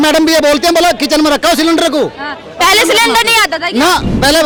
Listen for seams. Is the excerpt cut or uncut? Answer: uncut